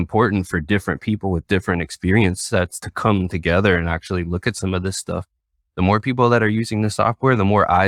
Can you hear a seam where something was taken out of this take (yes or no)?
no